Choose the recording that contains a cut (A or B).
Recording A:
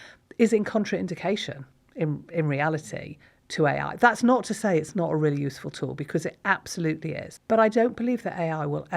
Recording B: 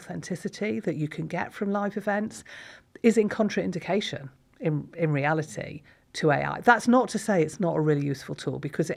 A